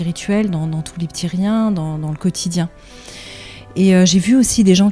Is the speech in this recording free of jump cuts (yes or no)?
yes